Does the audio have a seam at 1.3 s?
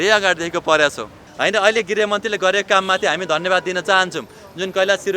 yes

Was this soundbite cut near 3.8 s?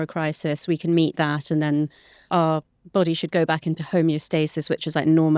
no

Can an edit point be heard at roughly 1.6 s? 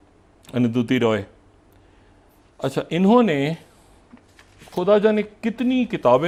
no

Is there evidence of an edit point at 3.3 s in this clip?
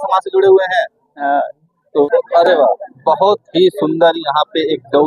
no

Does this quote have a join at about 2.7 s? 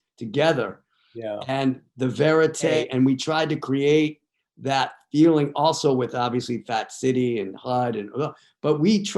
yes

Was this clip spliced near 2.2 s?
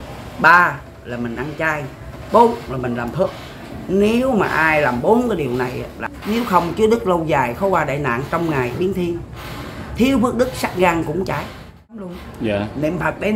no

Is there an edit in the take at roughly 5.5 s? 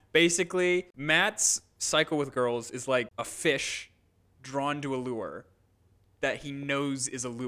no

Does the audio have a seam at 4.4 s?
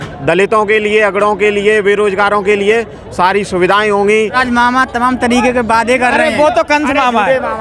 yes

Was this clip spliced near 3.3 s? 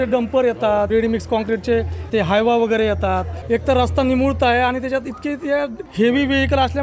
yes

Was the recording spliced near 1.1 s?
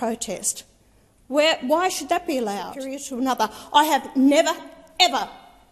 no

